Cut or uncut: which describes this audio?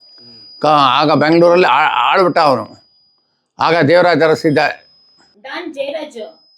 cut